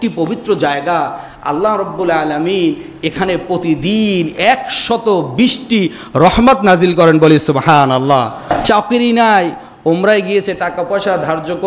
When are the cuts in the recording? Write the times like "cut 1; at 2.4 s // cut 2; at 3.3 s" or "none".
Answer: cut 1; at 8.4 s